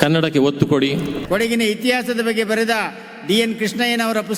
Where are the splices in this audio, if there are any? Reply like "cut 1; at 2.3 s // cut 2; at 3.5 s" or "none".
cut 1; at 1.2 s